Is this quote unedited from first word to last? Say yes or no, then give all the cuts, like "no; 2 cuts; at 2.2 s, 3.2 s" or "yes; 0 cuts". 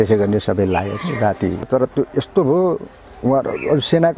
no; 1 cut; at 1.7 s